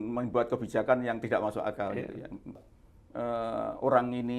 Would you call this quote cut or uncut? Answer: cut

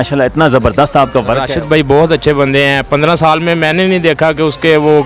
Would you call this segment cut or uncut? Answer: cut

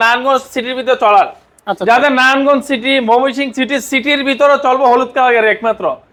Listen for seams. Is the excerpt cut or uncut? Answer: uncut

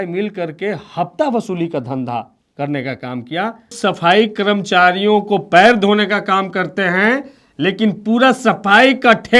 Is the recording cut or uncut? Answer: cut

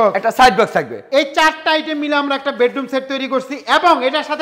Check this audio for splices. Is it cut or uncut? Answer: uncut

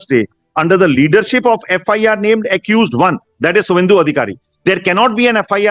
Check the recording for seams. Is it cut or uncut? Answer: uncut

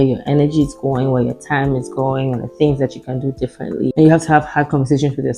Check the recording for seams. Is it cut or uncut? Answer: uncut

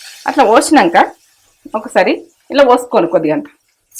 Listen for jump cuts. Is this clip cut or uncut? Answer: uncut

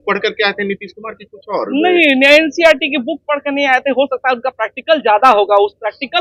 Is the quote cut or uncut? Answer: uncut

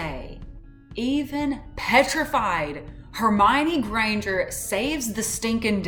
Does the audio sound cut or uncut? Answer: uncut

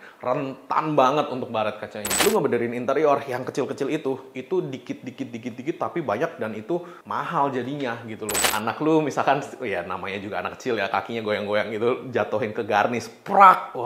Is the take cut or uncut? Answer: cut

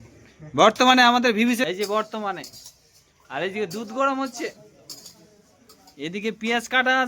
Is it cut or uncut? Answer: cut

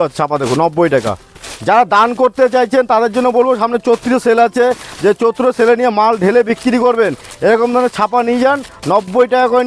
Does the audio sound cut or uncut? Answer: uncut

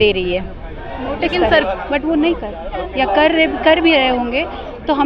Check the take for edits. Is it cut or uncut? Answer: cut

